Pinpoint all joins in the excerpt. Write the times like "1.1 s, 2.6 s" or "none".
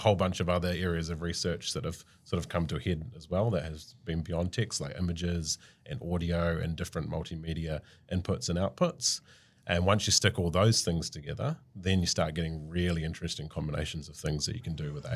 none